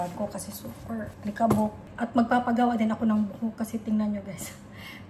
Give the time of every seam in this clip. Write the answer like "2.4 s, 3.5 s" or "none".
1.1 s, 1.9 s